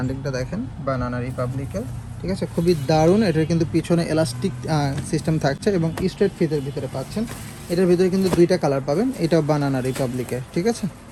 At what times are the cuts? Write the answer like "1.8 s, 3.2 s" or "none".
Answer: none